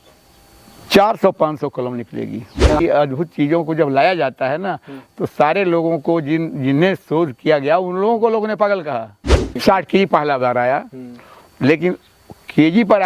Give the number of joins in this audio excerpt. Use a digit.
2